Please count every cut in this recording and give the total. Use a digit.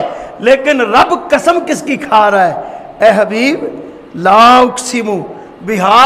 0